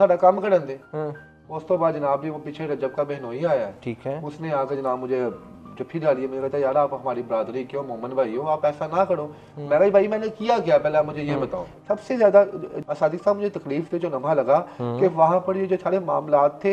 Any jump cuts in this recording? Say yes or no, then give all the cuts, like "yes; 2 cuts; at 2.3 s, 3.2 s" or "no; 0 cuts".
yes; 1 cut; at 11.7 s